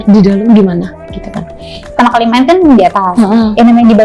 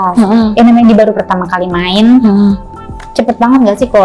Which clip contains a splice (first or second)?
first